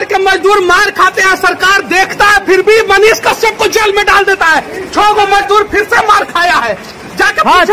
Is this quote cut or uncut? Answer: uncut